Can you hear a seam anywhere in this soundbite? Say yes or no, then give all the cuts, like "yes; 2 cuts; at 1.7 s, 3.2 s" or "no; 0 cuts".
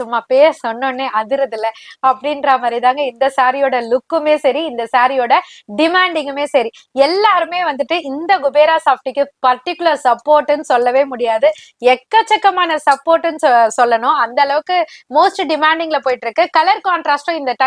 no; 0 cuts